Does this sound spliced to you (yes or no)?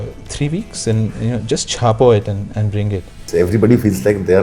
yes